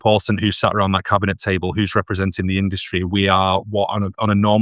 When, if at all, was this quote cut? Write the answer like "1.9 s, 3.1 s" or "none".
none